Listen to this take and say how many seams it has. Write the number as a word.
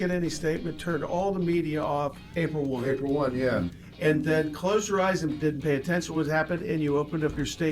one